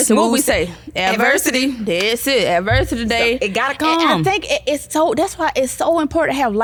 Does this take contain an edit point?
no; 0 cuts

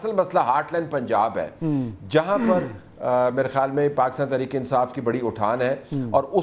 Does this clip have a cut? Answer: no; 0 cuts

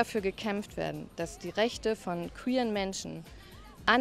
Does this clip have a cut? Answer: no; 0 cuts

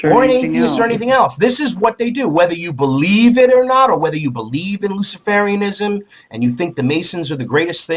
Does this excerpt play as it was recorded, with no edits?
no; 1 cut; at 3.7 s

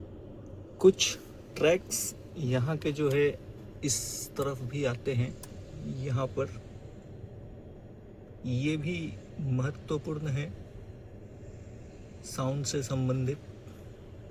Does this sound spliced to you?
no; 0 cuts

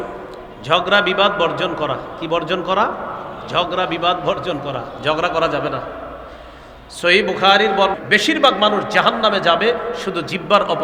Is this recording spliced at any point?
yes; 1 cut; at 7.9 s

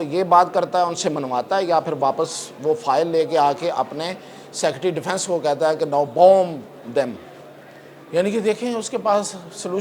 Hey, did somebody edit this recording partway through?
no; 0 cuts

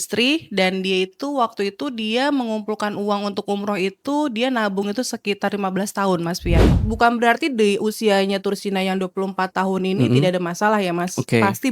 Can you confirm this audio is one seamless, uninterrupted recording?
no; 1 cut; at 6.6 s

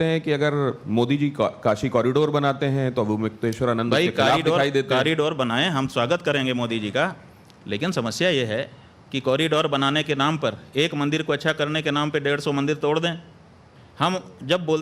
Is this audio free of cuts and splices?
no; 1 cut; at 11.9 s

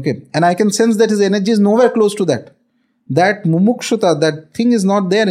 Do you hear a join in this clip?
no; 0 cuts

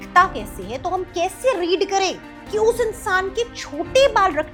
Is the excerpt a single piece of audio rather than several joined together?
yes; 0 cuts

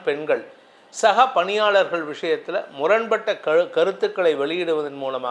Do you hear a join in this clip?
no; 0 cuts

